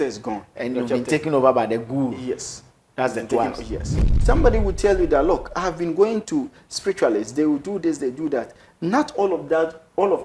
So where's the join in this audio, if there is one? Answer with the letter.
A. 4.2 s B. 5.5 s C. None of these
A